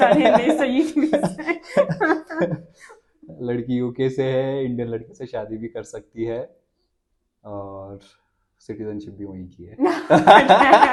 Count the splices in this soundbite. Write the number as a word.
zero